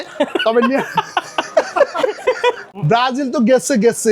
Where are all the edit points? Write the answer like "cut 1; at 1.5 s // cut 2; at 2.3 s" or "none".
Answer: cut 1; at 2.7 s